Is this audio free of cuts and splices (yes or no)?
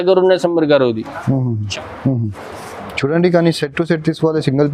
no